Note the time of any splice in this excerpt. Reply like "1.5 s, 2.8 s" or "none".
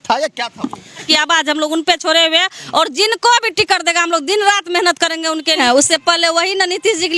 1.0 s, 5.6 s